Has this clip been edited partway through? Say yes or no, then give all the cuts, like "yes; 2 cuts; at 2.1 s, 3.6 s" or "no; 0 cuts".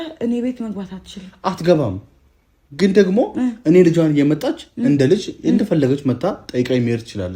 no; 0 cuts